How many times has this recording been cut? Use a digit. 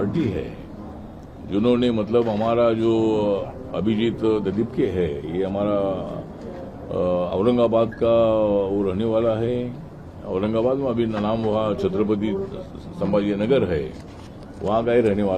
0